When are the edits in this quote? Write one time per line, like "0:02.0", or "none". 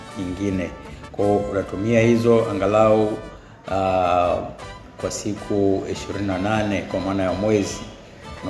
none